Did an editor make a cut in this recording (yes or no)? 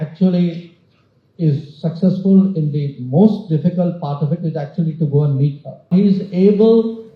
yes